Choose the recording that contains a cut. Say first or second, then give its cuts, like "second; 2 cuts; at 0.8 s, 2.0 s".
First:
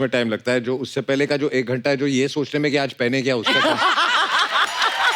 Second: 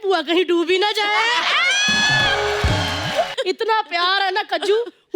second; 1 cut; at 3.3 s